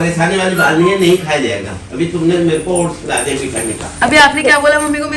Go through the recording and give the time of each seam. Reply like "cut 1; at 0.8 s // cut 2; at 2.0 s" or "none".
none